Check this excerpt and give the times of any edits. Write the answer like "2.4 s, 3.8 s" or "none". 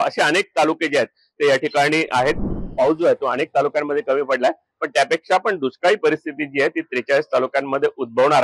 2.5 s